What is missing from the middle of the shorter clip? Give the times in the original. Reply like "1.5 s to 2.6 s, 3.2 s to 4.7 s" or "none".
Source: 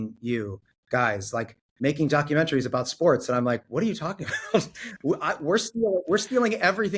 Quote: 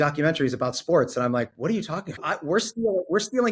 4.4 s to 5.3 s